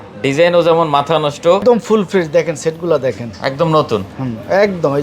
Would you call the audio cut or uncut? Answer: cut